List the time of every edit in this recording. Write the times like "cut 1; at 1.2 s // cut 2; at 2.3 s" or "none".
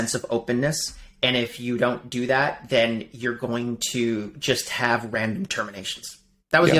none